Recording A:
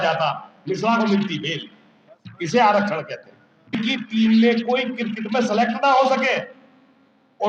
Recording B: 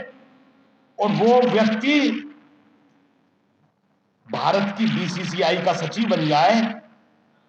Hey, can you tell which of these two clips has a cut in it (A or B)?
A